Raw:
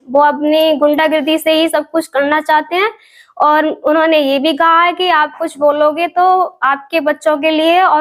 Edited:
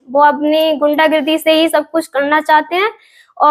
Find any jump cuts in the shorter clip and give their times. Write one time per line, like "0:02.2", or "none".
none